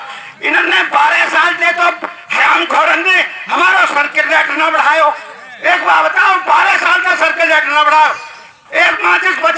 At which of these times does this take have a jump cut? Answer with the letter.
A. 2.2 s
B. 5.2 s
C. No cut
C